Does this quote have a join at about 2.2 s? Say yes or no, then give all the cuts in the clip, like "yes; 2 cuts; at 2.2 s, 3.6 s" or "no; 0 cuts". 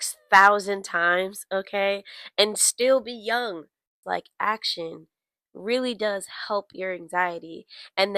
no; 1 cut; at 4.0 s